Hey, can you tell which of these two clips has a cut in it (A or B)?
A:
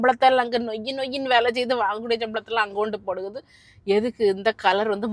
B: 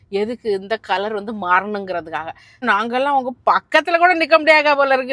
B